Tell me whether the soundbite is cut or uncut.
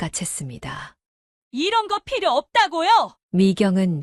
uncut